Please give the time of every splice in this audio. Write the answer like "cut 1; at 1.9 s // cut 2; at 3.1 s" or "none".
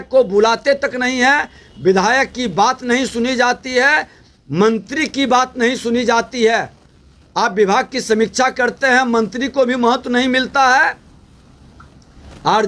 none